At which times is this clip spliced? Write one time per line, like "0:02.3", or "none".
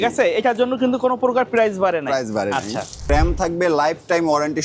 0:03.1